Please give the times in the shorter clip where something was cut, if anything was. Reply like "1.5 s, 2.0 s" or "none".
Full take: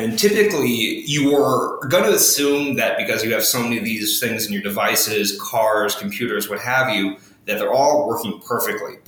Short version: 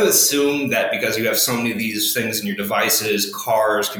none